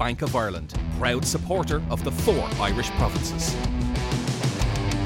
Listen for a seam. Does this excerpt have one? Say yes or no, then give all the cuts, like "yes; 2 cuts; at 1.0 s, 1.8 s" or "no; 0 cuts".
no; 0 cuts